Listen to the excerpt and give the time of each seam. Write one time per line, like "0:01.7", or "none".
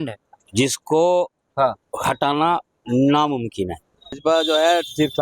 0:04.2